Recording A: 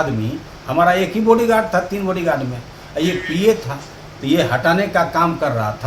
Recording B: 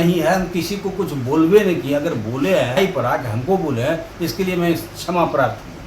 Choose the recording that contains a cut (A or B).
B